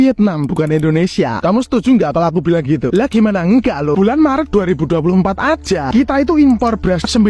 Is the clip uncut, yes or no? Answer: yes